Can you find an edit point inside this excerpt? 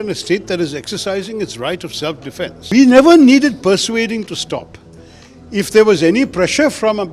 yes; 1 cut; at 2.7 s

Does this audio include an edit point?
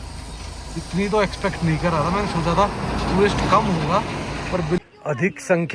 yes; 1 cut; at 4.8 s

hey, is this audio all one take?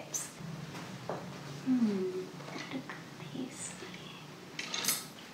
yes; 0 cuts

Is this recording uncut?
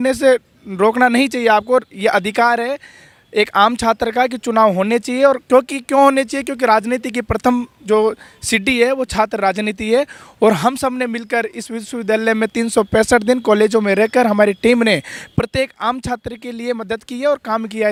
yes; 0 cuts

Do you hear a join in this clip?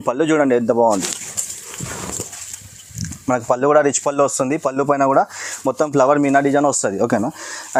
no; 0 cuts

